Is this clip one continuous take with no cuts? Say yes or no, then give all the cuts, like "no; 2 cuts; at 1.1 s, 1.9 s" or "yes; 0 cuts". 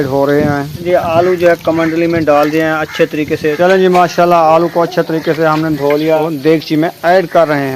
no; 3 cuts; at 0.8 s, 3.6 s, 6.2 s